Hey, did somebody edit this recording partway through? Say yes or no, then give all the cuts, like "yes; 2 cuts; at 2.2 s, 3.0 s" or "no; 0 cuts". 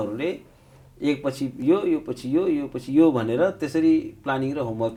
no; 0 cuts